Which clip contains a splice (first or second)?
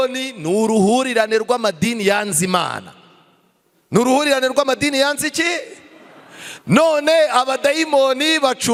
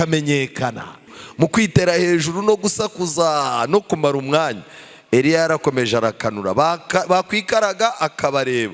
second